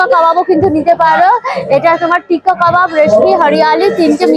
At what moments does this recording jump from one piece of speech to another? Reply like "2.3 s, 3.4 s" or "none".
none